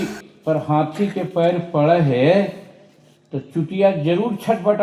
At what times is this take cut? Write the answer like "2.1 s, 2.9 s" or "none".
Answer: none